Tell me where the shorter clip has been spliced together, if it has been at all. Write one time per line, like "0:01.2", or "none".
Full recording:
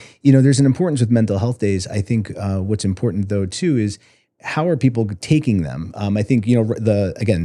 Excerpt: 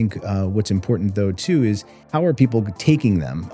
0:01.9